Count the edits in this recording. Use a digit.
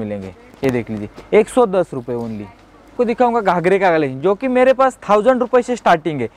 1